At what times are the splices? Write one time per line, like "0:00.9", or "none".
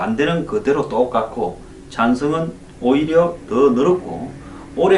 0:02.3